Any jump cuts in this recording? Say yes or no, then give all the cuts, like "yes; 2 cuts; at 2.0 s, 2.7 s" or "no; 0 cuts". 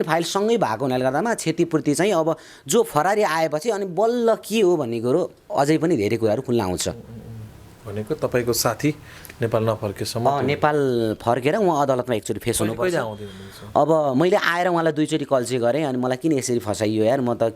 no; 0 cuts